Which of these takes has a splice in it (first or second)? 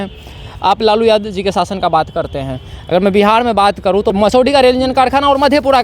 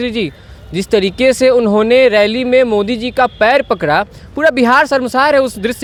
first